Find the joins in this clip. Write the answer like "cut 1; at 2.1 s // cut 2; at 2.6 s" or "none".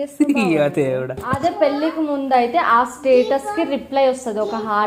cut 1; at 1.2 s